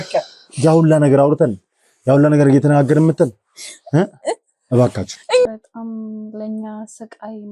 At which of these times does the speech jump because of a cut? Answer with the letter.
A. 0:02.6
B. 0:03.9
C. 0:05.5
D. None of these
C